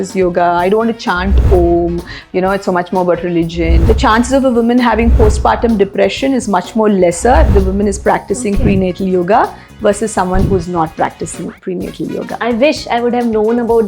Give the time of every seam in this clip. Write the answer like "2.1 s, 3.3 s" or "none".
3.8 s, 12.4 s

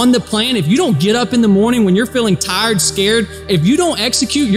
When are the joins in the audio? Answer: none

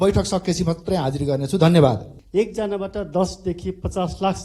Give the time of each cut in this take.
2.1 s

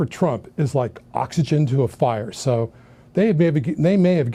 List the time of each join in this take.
none

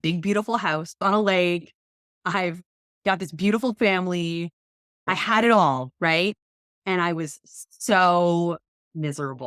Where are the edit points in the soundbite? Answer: 1.0 s, 5.1 s

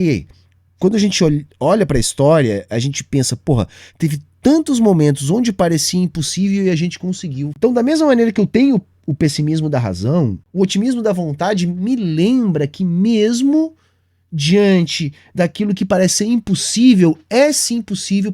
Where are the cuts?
7.5 s, 10.4 s

